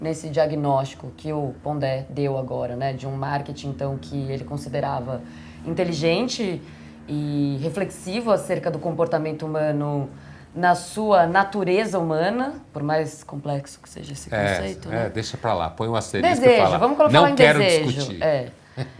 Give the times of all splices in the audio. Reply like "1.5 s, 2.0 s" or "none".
none

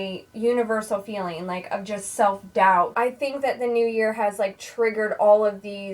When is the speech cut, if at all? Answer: 2.9 s

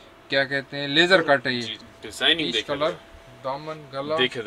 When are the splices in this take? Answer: 1.7 s

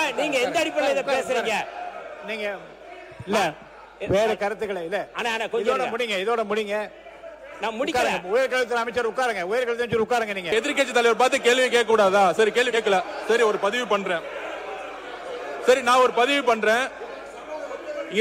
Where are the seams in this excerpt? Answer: 10.5 s

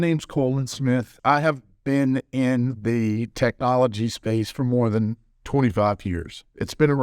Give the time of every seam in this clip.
1.1 s

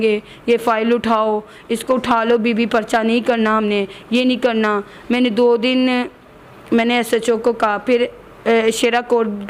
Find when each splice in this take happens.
none

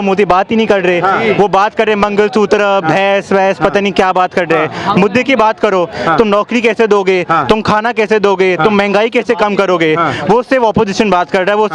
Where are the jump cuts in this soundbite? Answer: none

